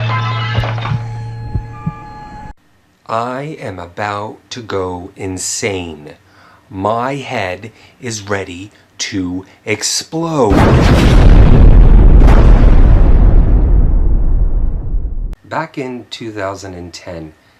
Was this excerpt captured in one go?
yes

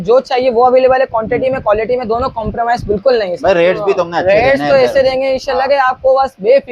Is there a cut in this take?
no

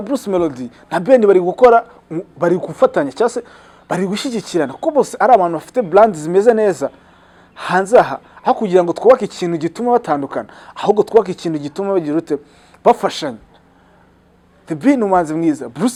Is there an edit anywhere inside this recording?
no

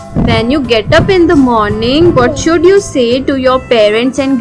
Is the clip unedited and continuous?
yes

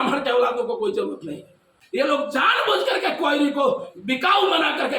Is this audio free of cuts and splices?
no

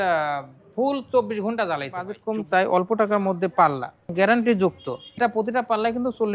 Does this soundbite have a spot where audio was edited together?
yes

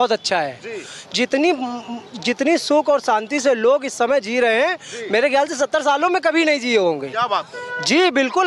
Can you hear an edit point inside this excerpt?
no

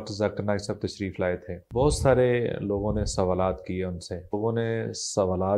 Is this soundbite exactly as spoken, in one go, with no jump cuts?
no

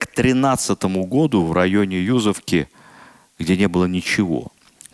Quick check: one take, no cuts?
yes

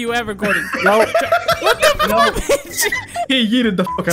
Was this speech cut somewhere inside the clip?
no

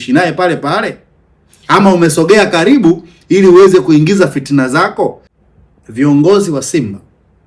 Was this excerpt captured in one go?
no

